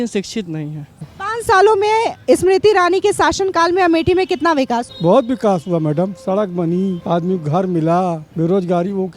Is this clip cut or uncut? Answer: cut